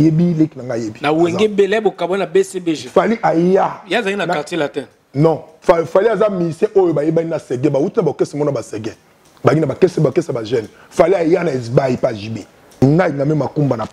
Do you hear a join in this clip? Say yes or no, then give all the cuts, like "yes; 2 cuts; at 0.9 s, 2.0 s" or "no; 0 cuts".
yes; 2 cuts; at 5.5 s, 12.8 s